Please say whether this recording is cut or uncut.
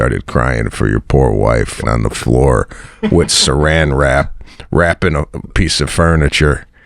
cut